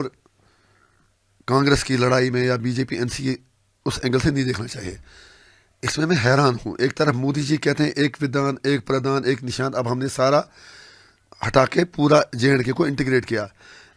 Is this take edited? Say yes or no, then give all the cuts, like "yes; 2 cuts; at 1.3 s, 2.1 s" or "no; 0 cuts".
no; 0 cuts